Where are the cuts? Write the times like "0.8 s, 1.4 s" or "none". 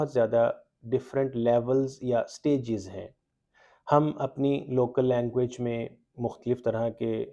none